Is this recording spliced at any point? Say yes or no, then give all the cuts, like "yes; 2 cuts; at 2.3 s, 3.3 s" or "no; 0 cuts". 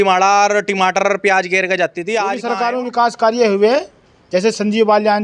yes; 1 cut; at 2.4 s